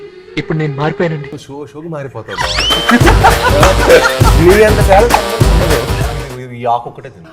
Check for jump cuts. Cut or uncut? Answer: cut